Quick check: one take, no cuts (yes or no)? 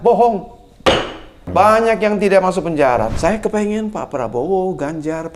no